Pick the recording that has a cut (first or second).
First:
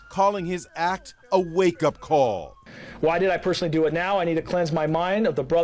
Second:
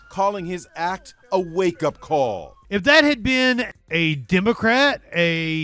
second